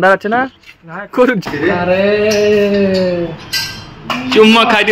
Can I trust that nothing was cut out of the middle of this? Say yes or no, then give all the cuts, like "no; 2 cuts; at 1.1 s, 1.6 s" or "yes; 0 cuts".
no; 1 cut; at 1.4 s